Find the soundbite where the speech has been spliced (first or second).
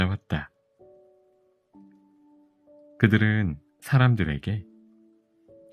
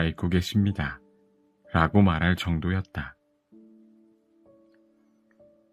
first